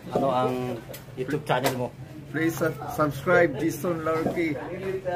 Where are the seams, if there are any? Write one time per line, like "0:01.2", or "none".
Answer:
none